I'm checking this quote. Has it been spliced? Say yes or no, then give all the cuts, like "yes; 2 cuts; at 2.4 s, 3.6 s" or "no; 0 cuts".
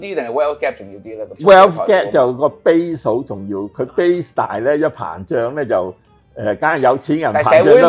yes; 1 cut; at 1.4 s